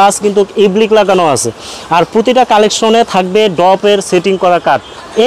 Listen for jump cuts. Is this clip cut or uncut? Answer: uncut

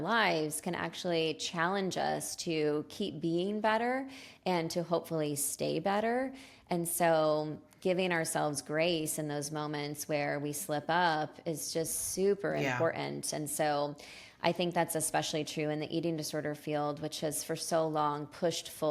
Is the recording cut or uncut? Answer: uncut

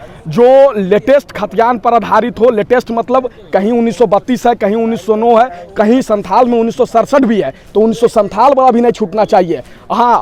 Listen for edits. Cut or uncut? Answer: uncut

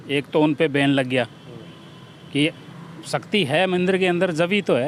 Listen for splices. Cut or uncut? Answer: uncut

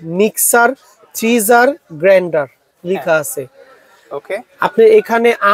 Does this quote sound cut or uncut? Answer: uncut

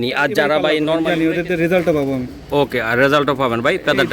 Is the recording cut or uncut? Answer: cut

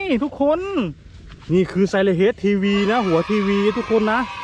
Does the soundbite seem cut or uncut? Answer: uncut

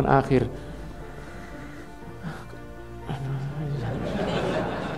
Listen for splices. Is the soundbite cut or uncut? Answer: uncut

